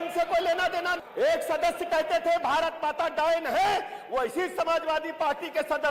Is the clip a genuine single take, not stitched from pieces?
no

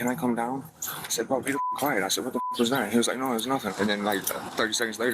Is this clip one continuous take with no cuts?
no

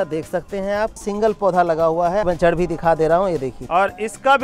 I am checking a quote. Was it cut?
yes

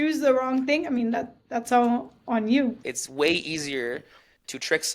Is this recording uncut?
no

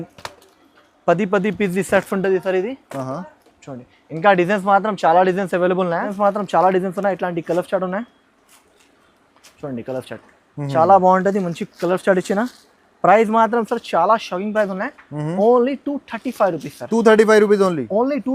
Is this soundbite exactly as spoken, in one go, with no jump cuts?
no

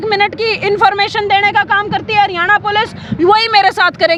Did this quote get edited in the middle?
no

